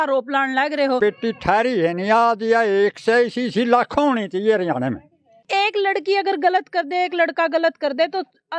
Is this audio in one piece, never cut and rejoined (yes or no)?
no